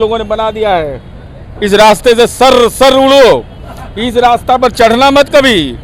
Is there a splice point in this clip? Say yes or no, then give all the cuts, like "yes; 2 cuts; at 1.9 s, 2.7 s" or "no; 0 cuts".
no; 0 cuts